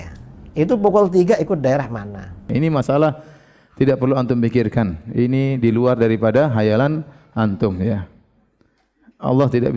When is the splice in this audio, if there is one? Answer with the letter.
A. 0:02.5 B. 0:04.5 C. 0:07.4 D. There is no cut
A